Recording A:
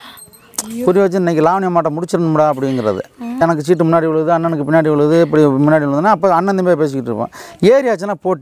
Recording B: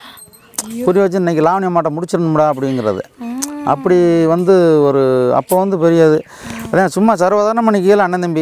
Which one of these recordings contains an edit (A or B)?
A